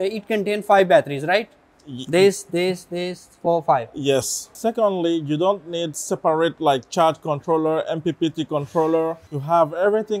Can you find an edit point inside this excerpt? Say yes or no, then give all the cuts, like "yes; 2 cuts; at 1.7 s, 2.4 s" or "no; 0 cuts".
yes; 2 cuts; at 4.5 s, 9.3 s